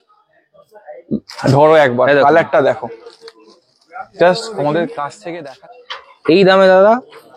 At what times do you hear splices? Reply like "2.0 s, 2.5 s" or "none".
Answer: 5.3 s